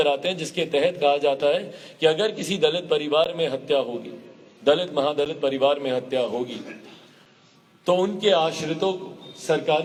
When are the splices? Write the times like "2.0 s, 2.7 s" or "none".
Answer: none